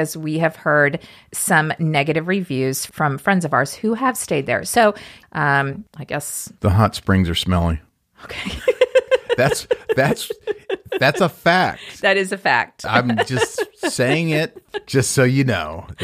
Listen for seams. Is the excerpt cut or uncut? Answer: cut